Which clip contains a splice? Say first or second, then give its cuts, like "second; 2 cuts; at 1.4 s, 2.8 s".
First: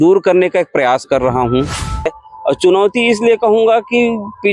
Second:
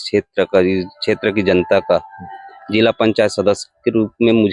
first; 1 cut; at 2.2 s